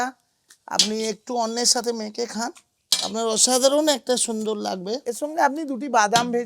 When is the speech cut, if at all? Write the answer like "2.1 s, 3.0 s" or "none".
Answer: 5.0 s